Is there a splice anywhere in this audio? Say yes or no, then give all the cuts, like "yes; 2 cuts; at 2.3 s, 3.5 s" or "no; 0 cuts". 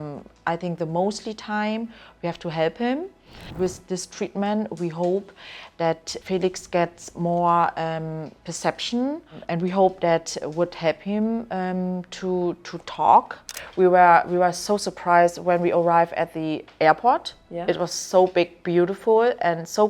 yes; 4 cuts; at 3.5 s, 6.1 s, 9.3 s, 13.6 s